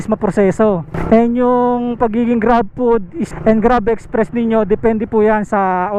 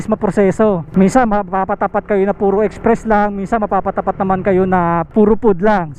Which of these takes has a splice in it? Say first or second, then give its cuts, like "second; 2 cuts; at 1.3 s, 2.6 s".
second; 2 cuts; at 0.9 s, 5.1 s